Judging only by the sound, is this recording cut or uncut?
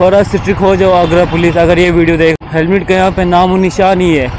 cut